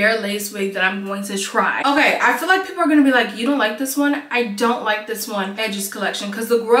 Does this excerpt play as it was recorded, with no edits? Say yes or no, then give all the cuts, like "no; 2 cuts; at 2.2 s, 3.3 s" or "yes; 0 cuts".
no; 2 cuts; at 1.8 s, 5.6 s